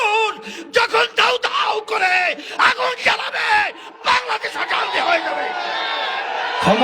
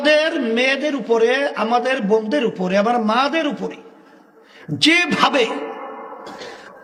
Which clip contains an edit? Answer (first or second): first